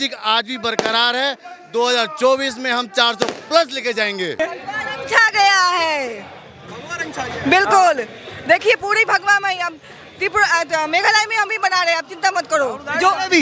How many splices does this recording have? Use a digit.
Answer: 1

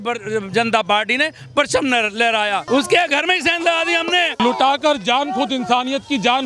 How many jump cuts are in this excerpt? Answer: 2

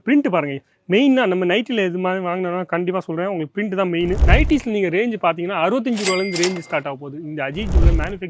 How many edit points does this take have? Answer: 1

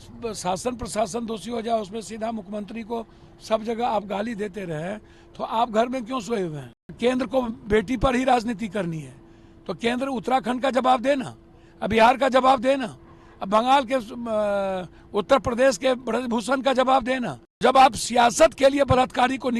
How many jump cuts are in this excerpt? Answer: 2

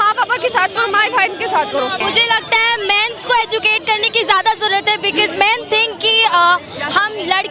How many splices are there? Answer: 1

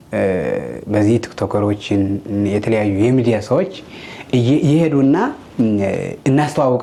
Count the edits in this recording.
0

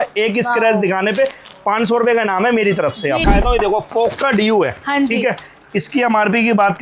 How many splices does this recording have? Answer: 1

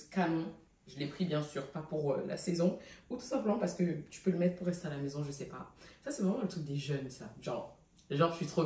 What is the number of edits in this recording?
0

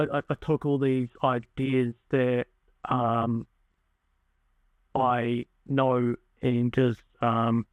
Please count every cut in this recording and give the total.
0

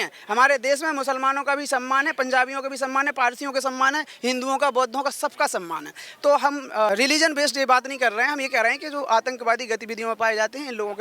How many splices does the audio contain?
1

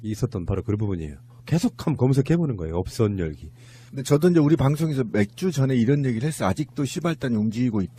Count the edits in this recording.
0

